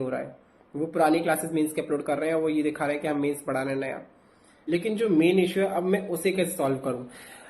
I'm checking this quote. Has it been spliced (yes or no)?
yes